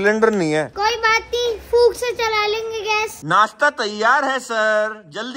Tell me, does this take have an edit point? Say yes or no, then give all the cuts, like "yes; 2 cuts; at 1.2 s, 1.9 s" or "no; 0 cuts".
yes; 1 cut; at 3.1 s